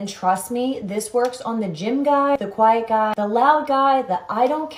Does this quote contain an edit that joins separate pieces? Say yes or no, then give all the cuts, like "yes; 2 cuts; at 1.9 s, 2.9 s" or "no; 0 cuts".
no; 0 cuts